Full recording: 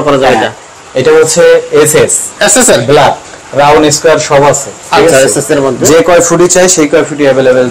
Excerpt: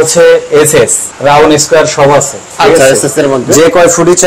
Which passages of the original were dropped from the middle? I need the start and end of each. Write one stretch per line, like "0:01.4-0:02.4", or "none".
0:02.2-0:03.4